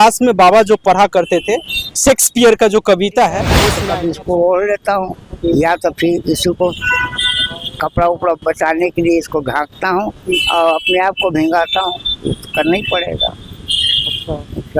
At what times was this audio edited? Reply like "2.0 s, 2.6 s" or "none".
3.5 s